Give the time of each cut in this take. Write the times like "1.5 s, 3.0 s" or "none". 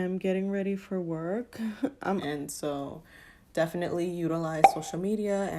2.2 s